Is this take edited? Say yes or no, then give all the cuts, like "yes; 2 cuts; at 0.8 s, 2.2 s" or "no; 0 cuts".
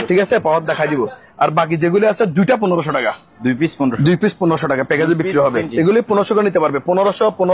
yes; 1 cut; at 5.7 s